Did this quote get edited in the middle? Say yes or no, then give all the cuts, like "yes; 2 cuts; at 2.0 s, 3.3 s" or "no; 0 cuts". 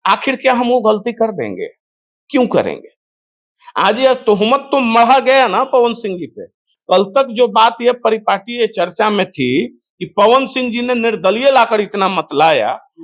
yes; 1 cut; at 6.6 s